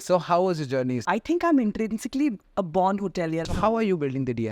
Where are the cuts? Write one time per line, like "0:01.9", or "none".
0:01.0
0:03.4